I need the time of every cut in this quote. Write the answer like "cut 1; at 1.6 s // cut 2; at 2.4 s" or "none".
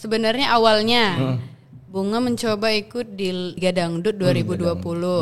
cut 1; at 3.5 s